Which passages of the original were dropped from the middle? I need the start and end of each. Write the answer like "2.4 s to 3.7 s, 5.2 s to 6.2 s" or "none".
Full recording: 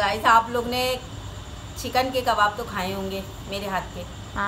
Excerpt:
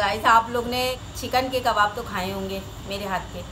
1.1 s to 1.7 s